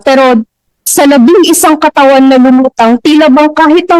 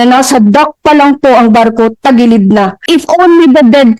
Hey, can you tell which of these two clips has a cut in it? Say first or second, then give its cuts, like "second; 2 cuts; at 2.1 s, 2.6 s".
second; 1 cut; at 2.8 s